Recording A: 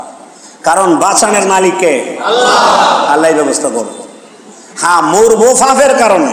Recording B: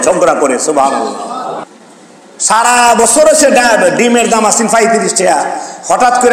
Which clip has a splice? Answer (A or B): B